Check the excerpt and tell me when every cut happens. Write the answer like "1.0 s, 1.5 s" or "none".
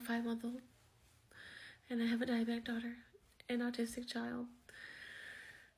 3.9 s